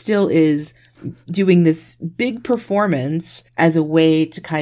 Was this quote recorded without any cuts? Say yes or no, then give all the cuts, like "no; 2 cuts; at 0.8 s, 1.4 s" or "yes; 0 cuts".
yes; 0 cuts